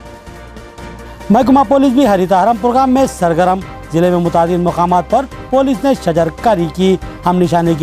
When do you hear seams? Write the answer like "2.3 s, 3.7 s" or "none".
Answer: 0.9 s